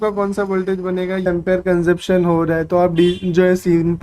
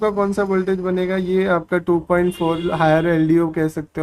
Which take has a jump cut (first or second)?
first